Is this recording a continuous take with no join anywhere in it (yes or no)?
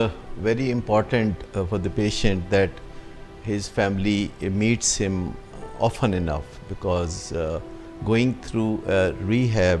yes